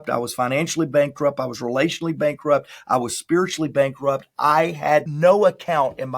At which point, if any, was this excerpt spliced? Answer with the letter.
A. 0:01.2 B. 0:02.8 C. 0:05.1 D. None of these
C